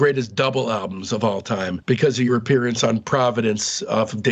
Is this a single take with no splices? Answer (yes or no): yes